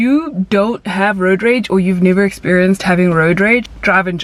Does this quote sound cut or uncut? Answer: uncut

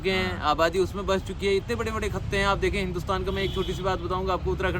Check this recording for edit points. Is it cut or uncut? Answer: uncut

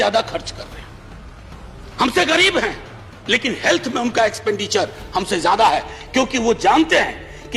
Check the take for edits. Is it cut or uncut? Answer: uncut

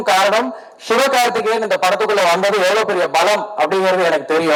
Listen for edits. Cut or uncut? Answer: uncut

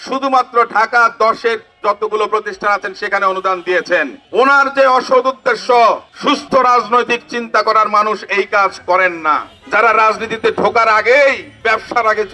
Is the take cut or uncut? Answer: cut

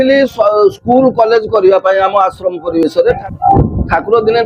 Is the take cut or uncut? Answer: cut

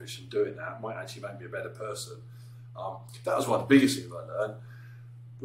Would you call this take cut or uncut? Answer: uncut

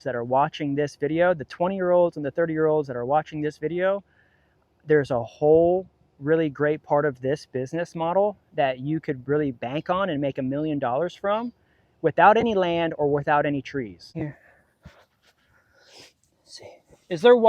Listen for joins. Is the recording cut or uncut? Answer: cut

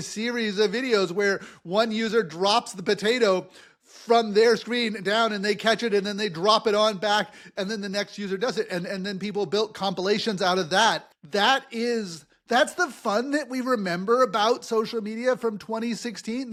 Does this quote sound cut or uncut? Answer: uncut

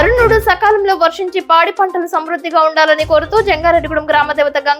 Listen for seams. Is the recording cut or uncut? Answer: uncut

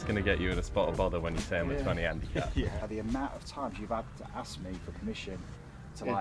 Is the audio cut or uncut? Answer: cut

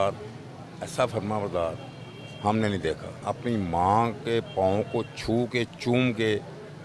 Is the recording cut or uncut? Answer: cut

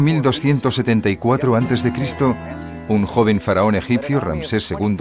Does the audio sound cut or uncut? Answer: uncut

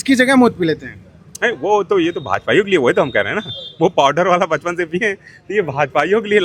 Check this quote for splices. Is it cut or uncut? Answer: uncut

